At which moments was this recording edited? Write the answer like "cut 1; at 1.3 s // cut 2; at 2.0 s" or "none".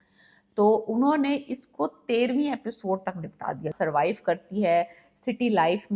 cut 1; at 3.7 s